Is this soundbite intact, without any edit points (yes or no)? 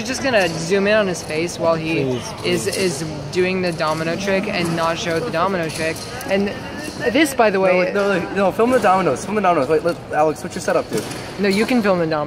no